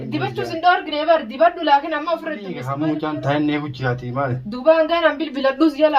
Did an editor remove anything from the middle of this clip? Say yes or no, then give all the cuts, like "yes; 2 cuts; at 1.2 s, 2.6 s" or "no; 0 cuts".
yes; 1 cut; at 2.6 s